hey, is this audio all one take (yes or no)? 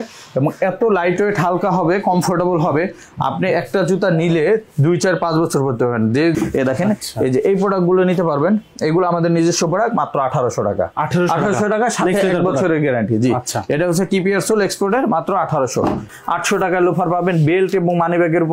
no